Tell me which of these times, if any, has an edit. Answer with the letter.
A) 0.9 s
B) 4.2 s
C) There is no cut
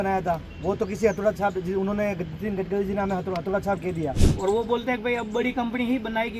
B